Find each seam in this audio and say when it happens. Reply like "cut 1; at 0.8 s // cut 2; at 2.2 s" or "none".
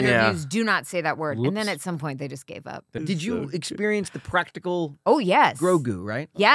cut 1; at 2.9 s